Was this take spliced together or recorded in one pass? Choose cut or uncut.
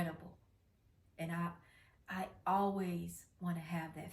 uncut